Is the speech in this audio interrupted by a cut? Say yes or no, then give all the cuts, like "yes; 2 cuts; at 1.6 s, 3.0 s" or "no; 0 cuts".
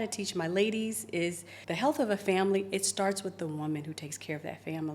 yes; 1 cut; at 1.5 s